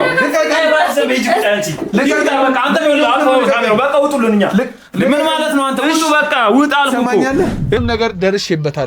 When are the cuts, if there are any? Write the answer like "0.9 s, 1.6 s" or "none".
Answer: 7.8 s